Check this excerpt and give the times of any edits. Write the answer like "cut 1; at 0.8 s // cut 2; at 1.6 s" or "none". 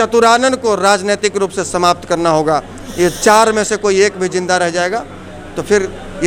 none